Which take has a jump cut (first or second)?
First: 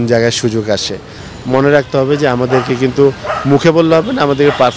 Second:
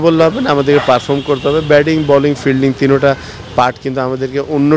first